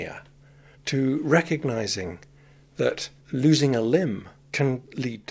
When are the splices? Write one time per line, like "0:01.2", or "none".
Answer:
0:03.1
0:04.4